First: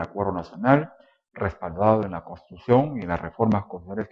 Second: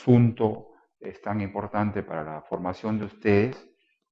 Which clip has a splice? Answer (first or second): second